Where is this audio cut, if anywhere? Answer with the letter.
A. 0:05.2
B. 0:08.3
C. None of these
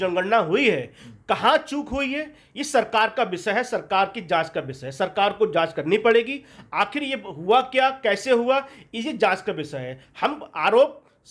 C